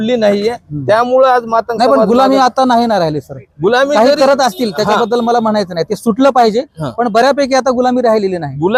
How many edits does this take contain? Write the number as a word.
zero